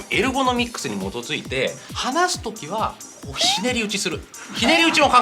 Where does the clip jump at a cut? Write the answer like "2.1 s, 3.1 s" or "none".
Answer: 1.9 s